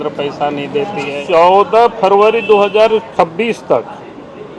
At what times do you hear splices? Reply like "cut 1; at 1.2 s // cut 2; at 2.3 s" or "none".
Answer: cut 1; at 1.2 s // cut 2; at 3.1 s